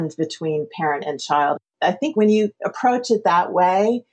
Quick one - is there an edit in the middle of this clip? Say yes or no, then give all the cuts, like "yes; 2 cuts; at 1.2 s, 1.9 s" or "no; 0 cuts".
yes; 1 cut; at 2.1 s